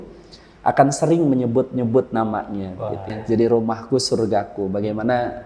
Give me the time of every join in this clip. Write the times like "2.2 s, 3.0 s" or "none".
3.1 s